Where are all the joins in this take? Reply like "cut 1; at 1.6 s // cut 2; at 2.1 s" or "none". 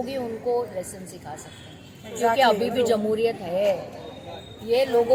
none

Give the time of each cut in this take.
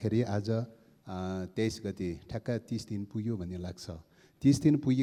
none

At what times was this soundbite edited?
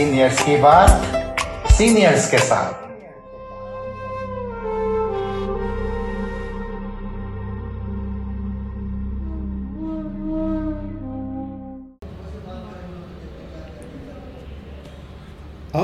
cut 1; at 11.9 s

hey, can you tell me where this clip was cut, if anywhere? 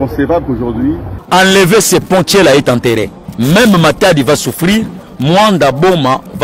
cut 1; at 1.1 s // cut 2; at 3.2 s

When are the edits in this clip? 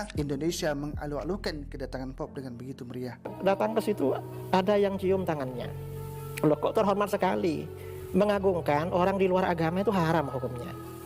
cut 1; at 3.3 s

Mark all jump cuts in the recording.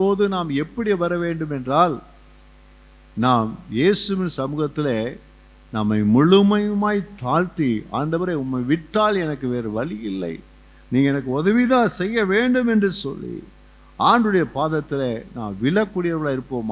none

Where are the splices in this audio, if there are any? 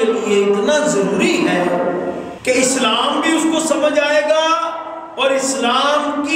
cut 1; at 2.3 s

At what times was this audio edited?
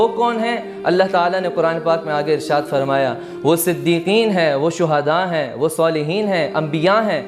none

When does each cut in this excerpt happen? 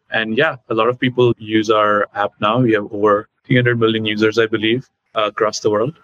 cut 1; at 3.3 s // cut 2; at 5.0 s

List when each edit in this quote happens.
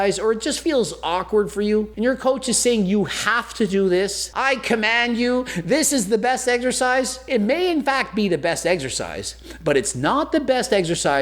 cut 1; at 1.9 s // cut 2; at 4.3 s // cut 3; at 7.2 s

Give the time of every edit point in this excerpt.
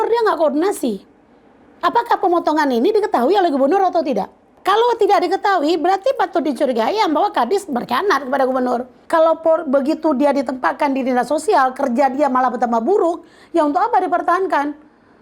cut 1; at 4.6 s // cut 2; at 8.9 s

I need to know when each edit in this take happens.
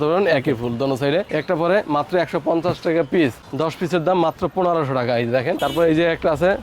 cut 1; at 1.3 s // cut 2; at 5.6 s

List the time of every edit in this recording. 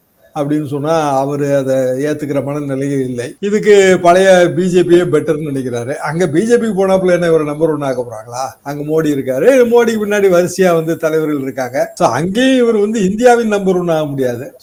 none

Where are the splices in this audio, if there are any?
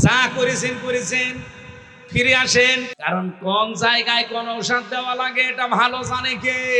cut 1; at 2.9 s

